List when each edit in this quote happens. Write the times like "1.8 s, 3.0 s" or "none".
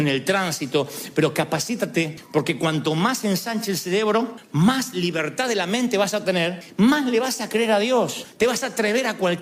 none

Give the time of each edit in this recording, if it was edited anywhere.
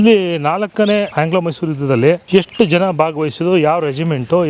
1.1 s, 2.2 s

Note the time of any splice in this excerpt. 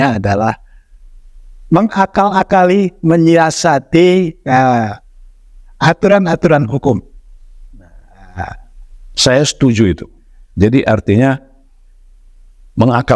none

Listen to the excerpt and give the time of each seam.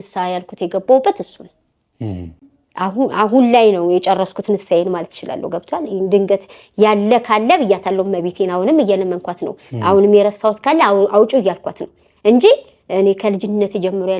none

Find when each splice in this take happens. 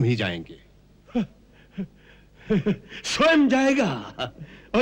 none

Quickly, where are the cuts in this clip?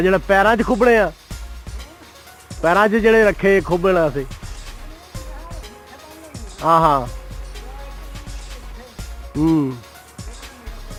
none

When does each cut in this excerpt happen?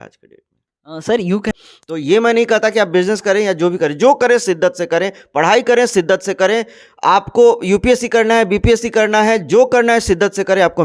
1.5 s

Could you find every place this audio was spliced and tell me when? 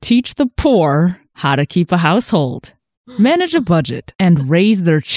1.3 s, 4.0 s

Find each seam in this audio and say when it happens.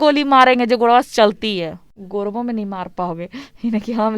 1.9 s

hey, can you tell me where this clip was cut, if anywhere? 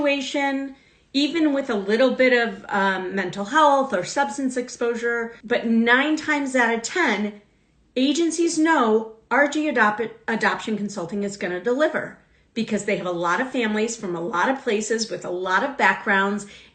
5.3 s

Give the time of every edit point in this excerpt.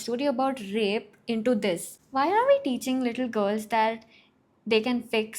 1.9 s

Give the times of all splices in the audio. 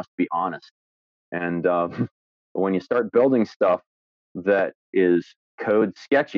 4.9 s

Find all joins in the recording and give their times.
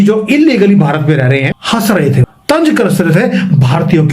1.5 s, 2.3 s

